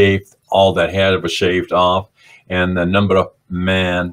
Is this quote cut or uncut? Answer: uncut